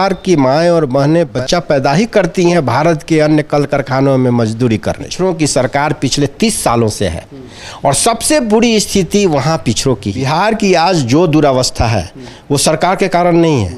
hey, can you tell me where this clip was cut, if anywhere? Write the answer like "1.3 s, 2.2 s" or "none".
1.3 s, 5.1 s, 10.2 s